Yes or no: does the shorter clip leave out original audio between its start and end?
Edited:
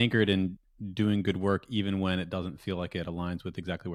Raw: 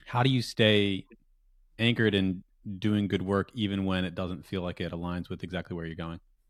no